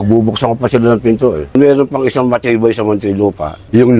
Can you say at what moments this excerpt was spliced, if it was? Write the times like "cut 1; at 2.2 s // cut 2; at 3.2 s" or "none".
cut 1; at 1.4 s